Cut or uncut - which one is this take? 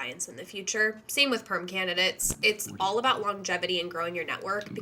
uncut